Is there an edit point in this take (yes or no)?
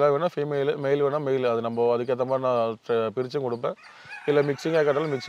no